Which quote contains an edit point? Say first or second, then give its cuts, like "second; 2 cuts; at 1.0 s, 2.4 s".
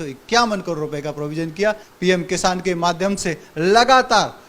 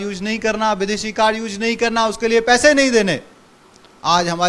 first; 1 cut; at 1.9 s